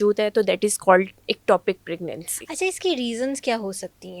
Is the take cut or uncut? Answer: uncut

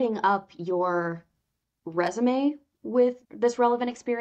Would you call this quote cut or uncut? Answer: cut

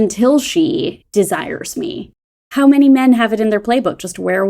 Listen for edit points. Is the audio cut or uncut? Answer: cut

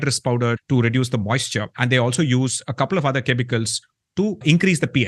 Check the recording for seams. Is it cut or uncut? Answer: uncut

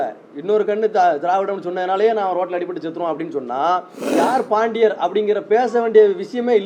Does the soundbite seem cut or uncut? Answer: cut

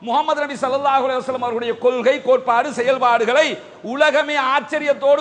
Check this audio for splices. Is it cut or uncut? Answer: uncut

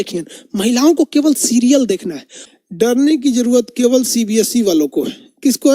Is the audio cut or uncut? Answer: cut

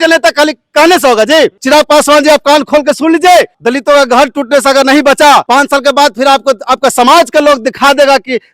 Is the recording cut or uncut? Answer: cut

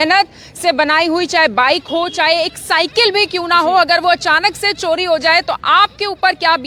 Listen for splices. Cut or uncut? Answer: uncut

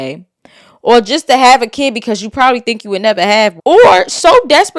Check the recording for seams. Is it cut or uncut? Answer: cut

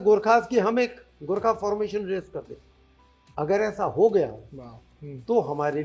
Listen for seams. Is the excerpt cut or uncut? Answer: uncut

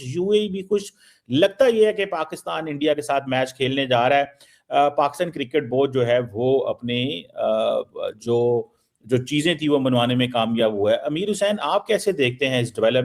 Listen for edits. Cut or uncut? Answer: uncut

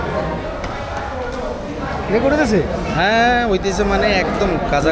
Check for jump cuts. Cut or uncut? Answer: uncut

